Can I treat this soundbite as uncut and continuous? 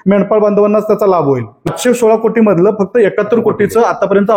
no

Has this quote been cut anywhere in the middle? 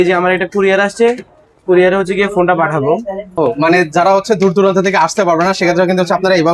yes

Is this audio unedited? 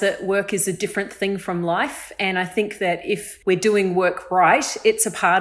no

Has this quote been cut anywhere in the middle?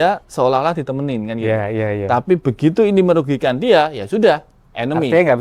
no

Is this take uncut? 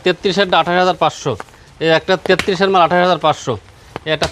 yes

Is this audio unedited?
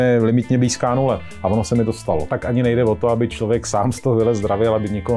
no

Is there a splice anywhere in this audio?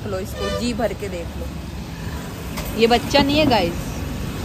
no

